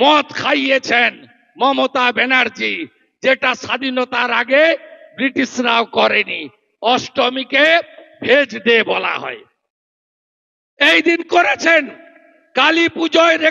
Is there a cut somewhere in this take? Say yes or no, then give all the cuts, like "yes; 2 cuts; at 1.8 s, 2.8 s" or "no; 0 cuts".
no; 0 cuts